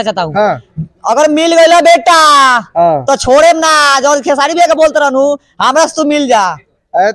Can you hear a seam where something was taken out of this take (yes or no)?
no